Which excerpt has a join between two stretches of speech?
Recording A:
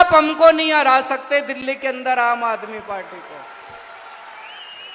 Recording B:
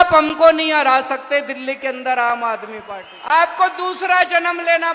B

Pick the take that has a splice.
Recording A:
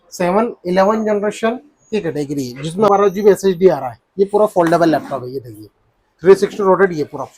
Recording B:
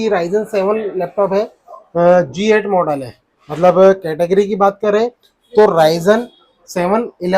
A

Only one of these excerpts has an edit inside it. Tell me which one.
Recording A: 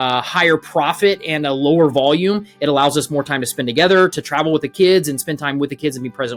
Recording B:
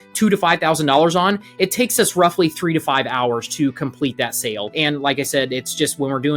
B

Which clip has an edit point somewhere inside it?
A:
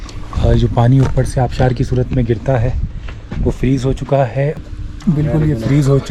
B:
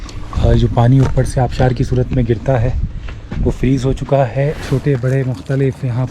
B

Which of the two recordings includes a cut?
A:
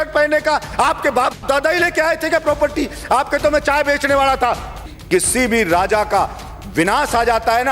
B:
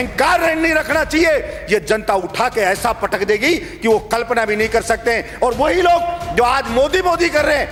A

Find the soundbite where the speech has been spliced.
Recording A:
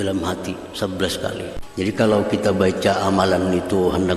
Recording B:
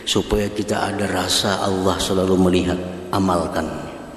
A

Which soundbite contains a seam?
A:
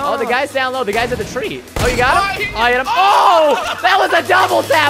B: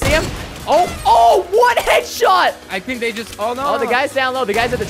B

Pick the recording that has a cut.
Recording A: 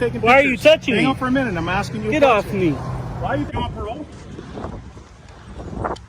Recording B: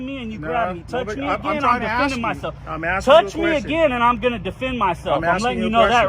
A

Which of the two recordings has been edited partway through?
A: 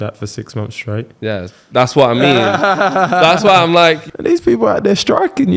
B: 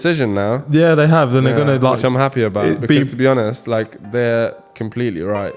A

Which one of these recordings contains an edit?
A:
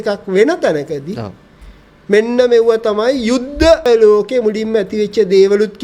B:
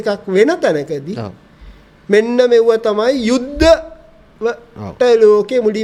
A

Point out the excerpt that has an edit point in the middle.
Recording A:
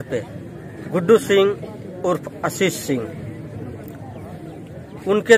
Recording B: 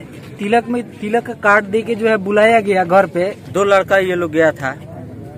B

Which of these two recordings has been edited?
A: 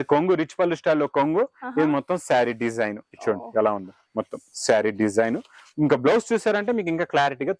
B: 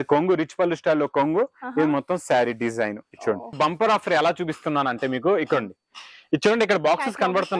B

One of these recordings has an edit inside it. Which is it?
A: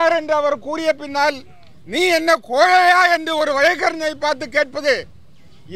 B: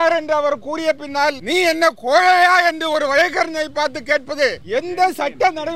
B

